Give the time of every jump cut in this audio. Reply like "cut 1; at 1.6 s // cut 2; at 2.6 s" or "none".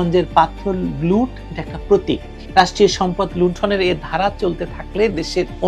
cut 1; at 2.3 s